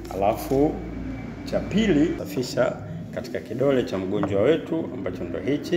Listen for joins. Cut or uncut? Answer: cut